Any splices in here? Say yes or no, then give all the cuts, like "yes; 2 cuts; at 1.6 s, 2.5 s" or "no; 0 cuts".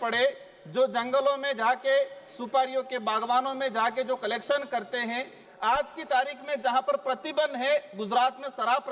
yes; 1 cut; at 5.4 s